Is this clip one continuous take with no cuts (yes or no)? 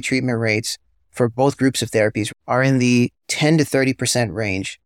yes